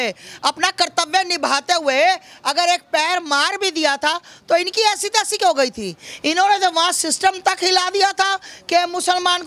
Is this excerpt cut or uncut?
uncut